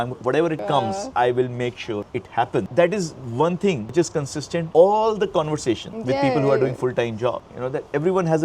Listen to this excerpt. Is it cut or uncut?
uncut